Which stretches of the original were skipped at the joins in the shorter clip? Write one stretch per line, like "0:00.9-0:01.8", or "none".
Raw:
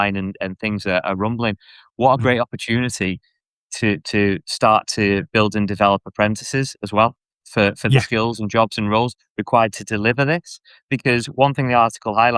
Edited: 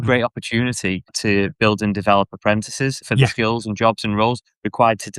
0:03.3-0:04.9
0:06.8-0:07.8